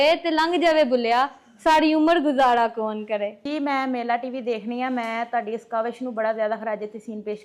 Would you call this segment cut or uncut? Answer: cut